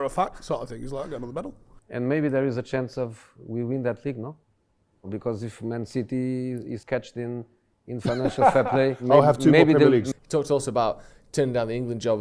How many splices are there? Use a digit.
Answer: 1